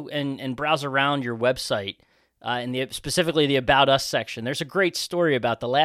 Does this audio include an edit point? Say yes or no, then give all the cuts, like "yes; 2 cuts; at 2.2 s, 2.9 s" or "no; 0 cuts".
no; 0 cuts